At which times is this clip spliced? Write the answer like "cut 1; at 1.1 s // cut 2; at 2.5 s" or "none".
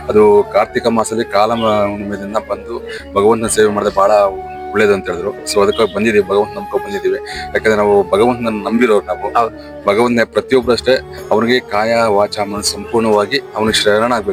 none